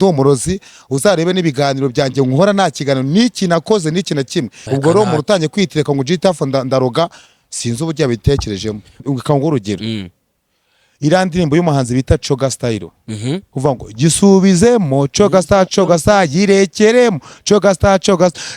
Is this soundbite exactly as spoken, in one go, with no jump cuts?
no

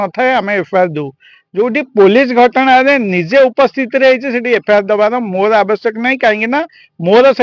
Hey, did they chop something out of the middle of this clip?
no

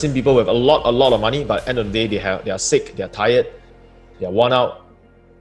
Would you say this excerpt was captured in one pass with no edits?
yes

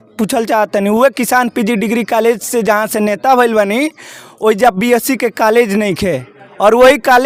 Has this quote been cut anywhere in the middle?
no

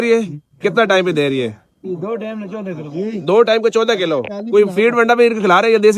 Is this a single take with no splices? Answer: yes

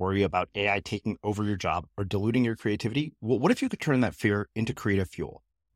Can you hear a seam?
no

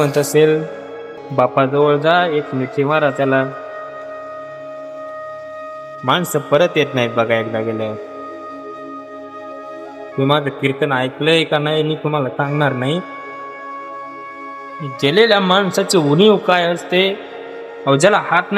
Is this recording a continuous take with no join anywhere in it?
yes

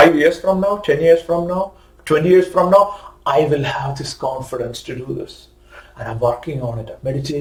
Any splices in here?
no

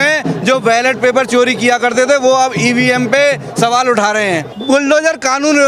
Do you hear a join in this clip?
yes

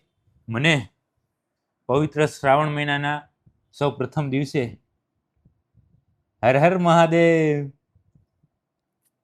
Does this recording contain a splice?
no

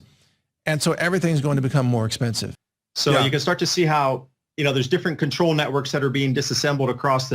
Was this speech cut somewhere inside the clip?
yes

